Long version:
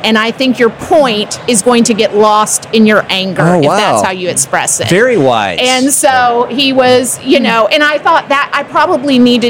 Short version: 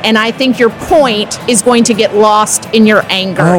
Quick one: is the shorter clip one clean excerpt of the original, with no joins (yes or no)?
yes